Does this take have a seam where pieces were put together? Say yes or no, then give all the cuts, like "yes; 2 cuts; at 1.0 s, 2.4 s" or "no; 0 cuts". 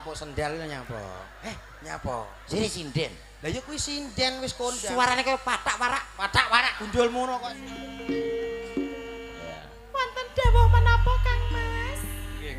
yes; 1 cut; at 7.5 s